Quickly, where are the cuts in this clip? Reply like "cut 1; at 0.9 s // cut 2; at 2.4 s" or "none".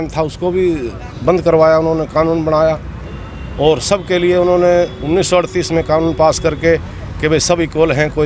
none